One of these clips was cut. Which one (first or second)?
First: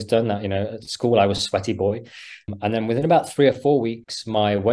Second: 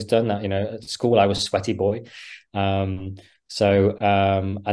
first